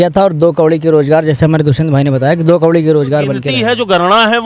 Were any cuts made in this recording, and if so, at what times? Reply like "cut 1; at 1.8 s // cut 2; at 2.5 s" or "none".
cut 1; at 3.5 s